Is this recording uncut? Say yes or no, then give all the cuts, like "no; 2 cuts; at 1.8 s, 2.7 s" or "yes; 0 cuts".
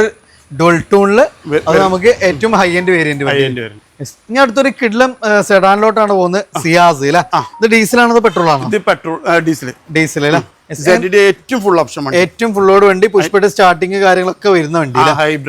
yes; 0 cuts